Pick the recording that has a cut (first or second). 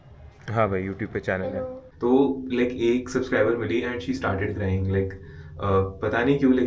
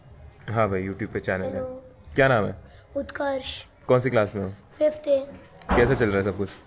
first